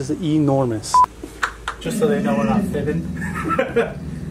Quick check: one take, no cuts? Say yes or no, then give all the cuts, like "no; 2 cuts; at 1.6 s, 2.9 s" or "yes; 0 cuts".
no; 1 cut; at 0.9 s